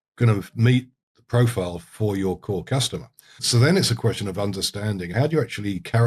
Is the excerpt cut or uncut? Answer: cut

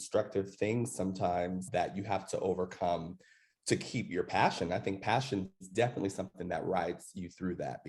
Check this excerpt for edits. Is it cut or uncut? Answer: uncut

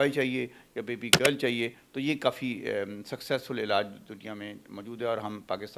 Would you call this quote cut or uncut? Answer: uncut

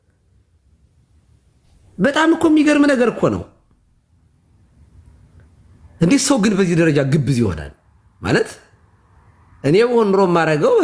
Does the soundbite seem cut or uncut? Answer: uncut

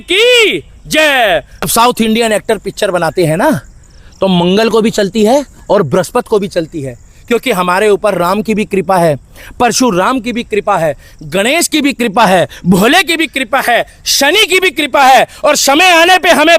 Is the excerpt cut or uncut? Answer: cut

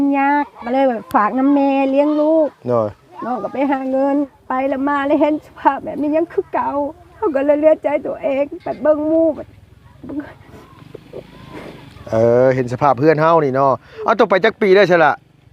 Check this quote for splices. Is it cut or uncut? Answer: cut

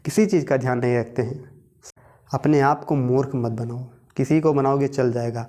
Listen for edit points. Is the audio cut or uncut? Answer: cut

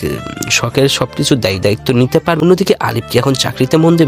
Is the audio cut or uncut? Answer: cut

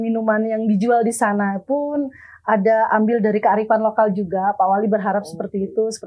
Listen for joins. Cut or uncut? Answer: uncut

